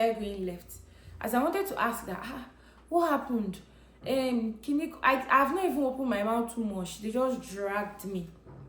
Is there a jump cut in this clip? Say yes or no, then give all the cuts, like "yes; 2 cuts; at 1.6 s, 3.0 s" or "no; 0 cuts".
no; 0 cuts